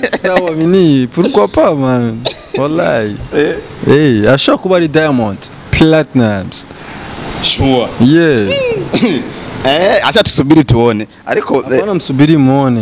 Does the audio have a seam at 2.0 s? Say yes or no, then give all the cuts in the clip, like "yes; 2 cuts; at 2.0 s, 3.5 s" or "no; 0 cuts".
no; 0 cuts